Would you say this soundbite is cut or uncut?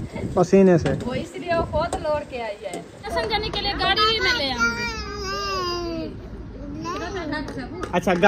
cut